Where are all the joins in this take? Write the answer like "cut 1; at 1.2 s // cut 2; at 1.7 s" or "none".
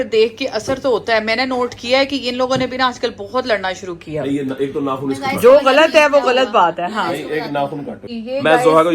cut 1; at 8.0 s